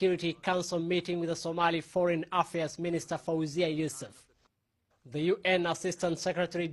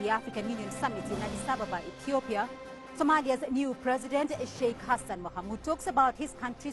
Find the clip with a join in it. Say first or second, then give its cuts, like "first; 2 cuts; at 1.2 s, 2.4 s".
second; 1 cut; at 1.4 s